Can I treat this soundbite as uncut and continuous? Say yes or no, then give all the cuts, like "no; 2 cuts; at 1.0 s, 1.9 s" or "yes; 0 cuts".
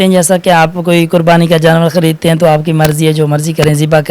yes; 0 cuts